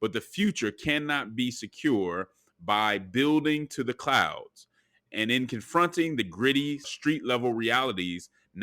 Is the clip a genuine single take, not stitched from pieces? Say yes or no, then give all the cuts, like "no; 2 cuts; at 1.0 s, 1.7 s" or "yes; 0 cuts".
no; 2 cuts; at 5.1 s, 6.9 s